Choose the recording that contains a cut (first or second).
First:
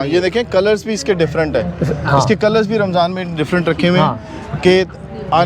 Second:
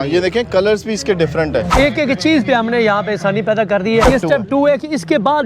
second